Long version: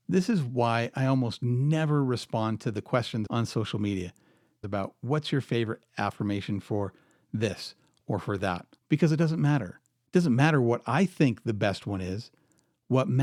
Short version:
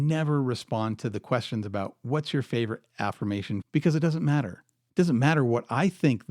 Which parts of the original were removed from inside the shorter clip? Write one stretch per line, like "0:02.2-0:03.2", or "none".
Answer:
0:03.3-0:04.6
0:06.6-0:08.8